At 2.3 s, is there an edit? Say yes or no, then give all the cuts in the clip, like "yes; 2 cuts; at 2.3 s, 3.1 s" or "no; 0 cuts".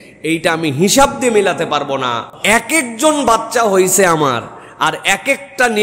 yes; 1 cut; at 2.3 s